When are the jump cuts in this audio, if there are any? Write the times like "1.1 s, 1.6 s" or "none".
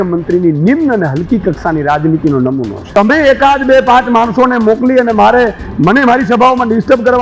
2.8 s